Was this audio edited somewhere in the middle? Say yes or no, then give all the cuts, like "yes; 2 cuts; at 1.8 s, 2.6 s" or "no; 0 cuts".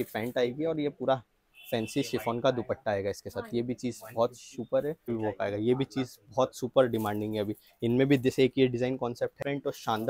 yes; 2 cuts; at 5.1 s, 9.3 s